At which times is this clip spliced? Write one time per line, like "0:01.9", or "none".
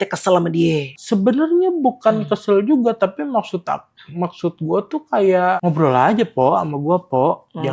0:00.9
0:05.6